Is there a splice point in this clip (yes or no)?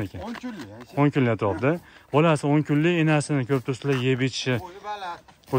no